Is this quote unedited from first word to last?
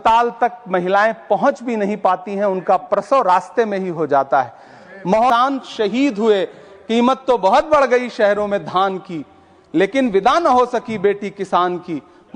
no; 1 cut; at 5.3 s

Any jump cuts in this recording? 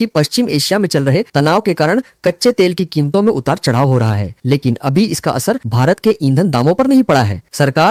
no; 0 cuts

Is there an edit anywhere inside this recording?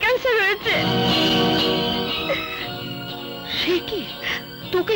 no; 0 cuts

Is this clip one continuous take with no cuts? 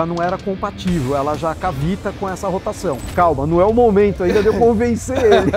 no; 1 cut; at 3.0 s

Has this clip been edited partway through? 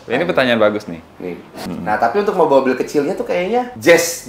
yes; 1 cut; at 1.6 s

